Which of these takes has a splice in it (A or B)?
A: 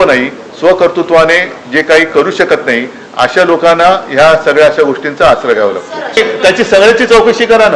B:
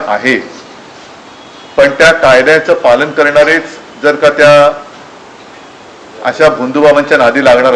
A